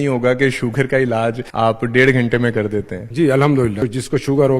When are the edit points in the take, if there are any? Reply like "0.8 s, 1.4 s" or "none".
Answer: 1.4 s, 3.0 s, 3.8 s